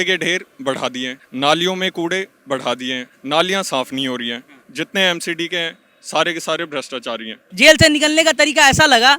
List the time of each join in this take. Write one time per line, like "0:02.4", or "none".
0:01.2
0:03.1
0:07.4